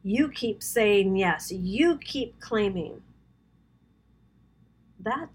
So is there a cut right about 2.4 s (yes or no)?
no